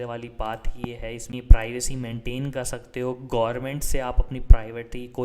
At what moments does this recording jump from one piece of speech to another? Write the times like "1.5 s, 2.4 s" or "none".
1.3 s